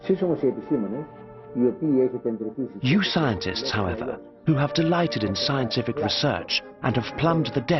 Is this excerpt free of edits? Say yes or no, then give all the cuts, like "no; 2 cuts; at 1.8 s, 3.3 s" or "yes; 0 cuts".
yes; 0 cuts